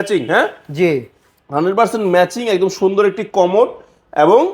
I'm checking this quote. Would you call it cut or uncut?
uncut